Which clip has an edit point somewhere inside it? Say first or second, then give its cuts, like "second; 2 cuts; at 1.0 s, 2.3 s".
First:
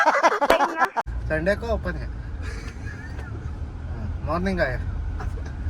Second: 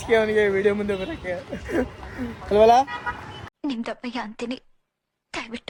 first; 1 cut; at 1.1 s